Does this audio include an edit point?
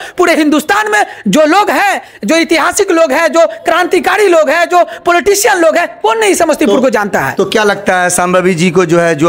no; 0 cuts

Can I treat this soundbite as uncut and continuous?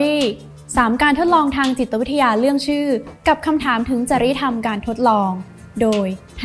yes; 0 cuts

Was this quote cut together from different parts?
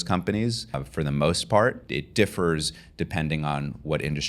yes; 2 cuts; at 0.8 s, 1.8 s

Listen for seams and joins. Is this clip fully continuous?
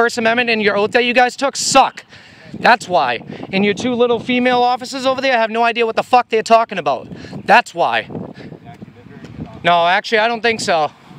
yes; 0 cuts

